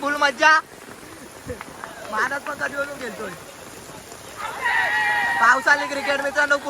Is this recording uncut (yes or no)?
no